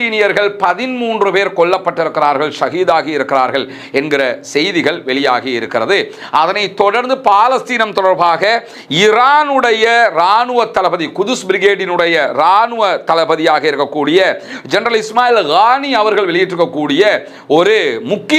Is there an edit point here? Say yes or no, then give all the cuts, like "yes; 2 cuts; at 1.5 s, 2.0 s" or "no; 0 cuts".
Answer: no; 0 cuts